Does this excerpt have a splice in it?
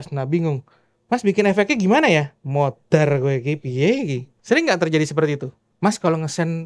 no; 0 cuts

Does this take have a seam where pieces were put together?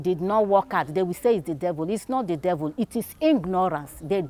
no; 0 cuts

